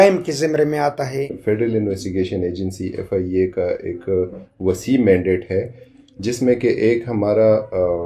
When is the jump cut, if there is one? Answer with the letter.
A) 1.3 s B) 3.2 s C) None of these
A